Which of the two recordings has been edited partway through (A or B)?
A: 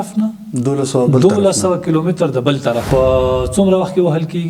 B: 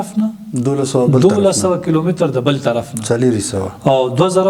A